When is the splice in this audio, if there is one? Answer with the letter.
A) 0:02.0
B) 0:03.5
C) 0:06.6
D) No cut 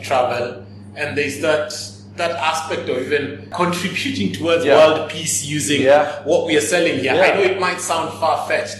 B